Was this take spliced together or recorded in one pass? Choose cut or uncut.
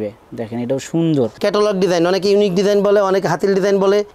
cut